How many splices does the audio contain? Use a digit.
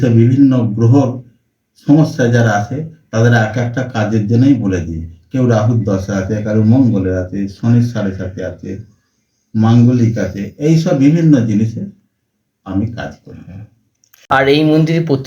1